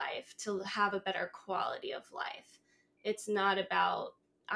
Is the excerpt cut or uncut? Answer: uncut